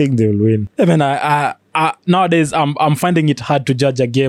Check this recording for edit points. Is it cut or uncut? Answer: uncut